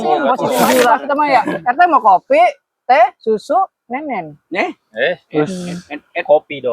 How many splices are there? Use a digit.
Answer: 1